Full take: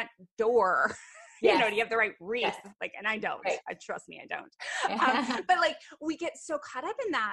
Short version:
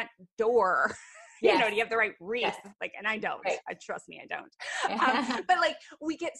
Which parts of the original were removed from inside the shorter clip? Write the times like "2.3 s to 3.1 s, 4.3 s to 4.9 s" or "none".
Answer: none